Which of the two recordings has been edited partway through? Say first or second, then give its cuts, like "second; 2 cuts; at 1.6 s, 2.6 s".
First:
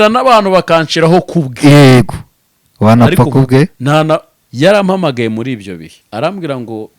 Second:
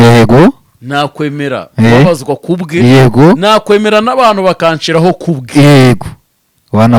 first; 2 cuts; at 4.4 s, 5.9 s